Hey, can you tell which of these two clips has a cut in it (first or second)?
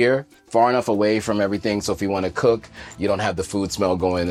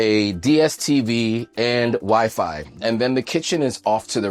second